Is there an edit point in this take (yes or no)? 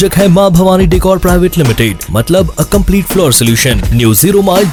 no